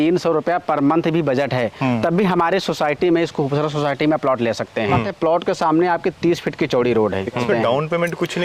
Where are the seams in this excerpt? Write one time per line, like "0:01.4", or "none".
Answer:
0:05.1
0:07.4